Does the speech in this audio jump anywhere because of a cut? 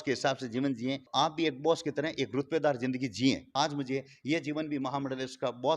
yes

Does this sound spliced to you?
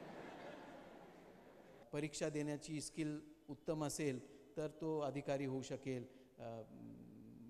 yes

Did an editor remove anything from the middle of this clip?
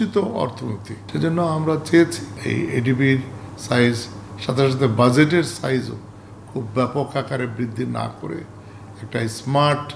yes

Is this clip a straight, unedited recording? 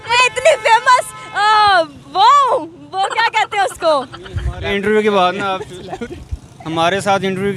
yes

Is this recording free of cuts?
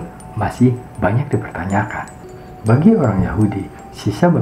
no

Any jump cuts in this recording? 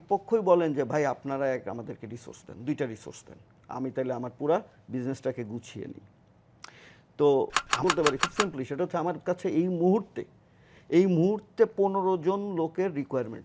yes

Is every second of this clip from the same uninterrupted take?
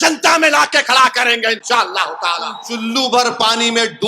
no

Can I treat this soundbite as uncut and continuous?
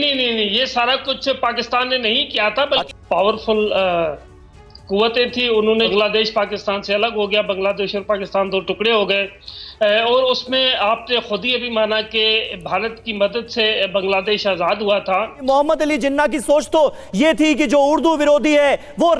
no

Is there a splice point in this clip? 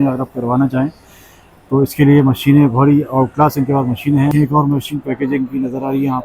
yes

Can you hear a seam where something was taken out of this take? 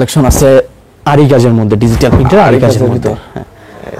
no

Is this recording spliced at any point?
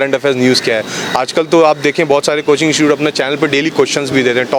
no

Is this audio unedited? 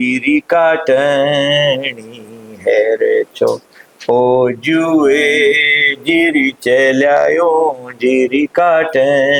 yes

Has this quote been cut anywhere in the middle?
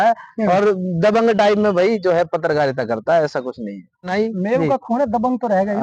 yes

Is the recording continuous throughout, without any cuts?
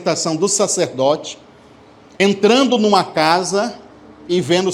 yes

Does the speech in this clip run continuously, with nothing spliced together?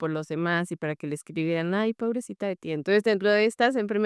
yes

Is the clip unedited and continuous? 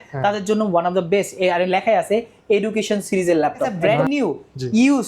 no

